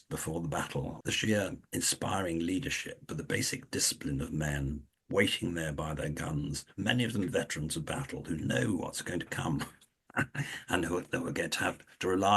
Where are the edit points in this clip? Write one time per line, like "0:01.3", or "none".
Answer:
0:01.0
0:01.6